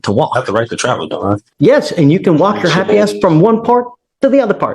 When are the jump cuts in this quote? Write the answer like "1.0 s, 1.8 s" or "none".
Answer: 1.5 s

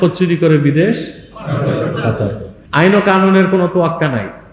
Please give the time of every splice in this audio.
2.5 s

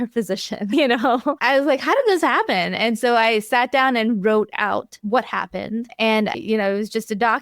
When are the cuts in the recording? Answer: 1.4 s, 5.0 s, 6.3 s

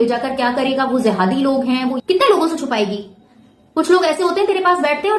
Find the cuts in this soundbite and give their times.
2.0 s

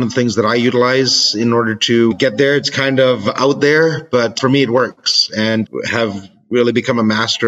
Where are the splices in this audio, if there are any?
2.1 s, 4.3 s, 5.6 s

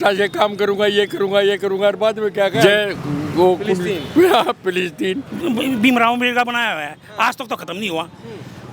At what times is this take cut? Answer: 2.6 s, 5.3 s

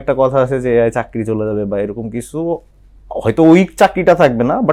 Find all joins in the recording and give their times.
none

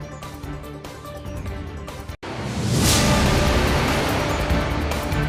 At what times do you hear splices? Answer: none

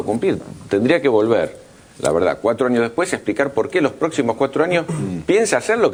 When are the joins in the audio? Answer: none

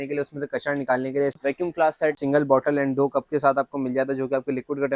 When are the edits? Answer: 1.4 s, 2.2 s

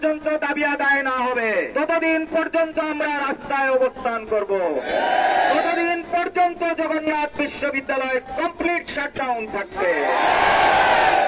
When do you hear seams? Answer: none

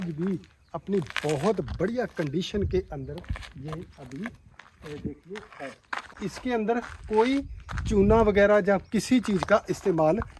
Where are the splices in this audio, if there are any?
6.1 s

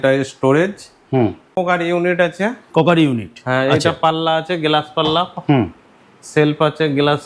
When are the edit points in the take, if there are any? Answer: 1.6 s

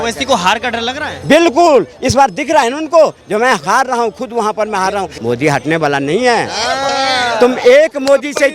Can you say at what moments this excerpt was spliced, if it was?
5.1 s

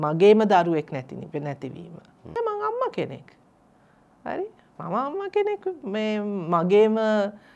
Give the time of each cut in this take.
2.3 s

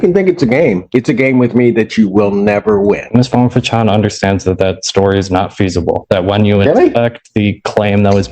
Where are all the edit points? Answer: 3.0 s

